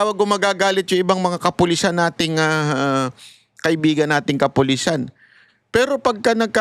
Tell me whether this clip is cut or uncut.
uncut